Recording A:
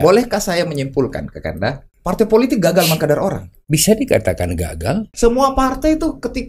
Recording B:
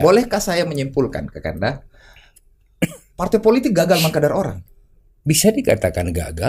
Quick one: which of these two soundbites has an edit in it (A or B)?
A